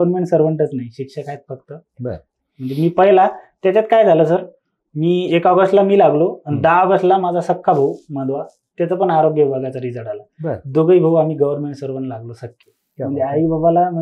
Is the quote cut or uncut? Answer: uncut